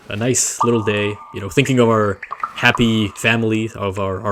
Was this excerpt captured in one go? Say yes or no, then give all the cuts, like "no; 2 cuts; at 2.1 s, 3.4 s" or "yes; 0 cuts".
yes; 0 cuts